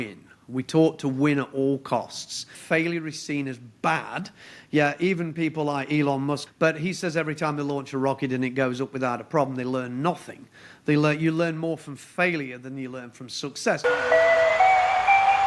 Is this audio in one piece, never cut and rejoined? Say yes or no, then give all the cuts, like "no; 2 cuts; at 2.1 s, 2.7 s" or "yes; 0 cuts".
no; 3 cuts; at 2.5 s, 6.4 s, 13.8 s